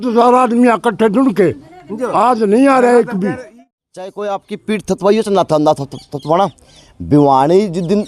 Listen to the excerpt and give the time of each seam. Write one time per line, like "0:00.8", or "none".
0:03.5